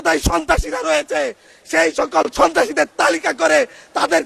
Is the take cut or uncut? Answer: uncut